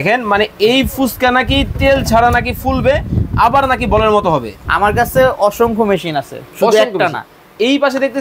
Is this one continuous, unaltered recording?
no; 1 cut; at 4.6 s

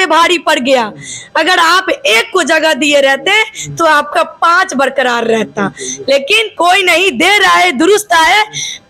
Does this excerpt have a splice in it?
no; 0 cuts

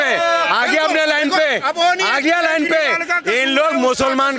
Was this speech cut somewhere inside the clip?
no; 0 cuts

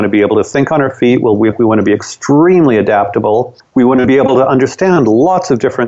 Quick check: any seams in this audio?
yes; 1 cut; at 3.6 s

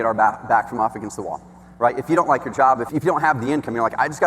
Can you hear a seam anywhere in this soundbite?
yes; 1 cut; at 2.9 s

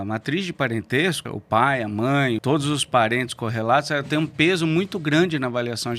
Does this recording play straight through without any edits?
no; 2 cuts; at 1.3 s, 2.4 s

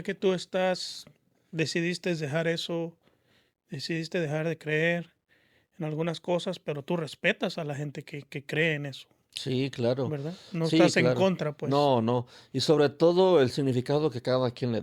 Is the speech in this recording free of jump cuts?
yes; 0 cuts

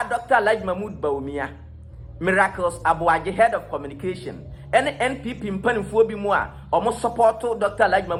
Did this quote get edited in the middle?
no; 0 cuts

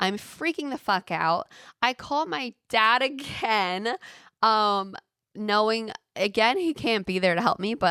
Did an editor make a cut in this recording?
no; 0 cuts

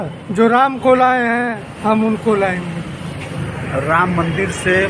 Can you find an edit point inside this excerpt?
no; 0 cuts

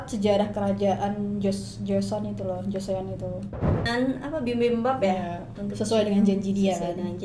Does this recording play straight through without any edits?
no; 1 cut; at 3.8 s

